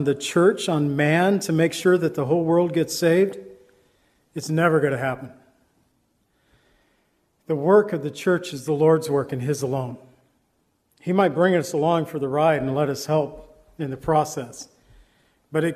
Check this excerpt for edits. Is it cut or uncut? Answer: uncut